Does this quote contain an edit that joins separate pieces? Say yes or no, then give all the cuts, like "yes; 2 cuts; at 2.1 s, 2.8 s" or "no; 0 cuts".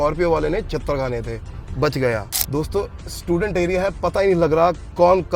yes; 1 cut; at 2.4 s